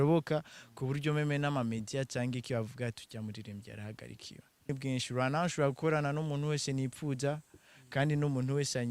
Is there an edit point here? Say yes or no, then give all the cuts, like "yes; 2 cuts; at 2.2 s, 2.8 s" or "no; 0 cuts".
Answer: yes; 1 cut; at 4.7 s